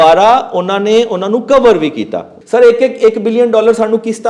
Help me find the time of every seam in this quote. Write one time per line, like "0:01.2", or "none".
0:02.3